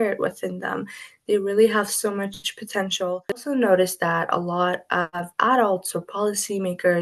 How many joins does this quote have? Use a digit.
1